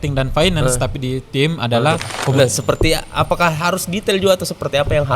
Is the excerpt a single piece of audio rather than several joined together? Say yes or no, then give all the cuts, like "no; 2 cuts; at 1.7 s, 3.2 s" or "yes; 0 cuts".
no; 1 cut; at 2.3 s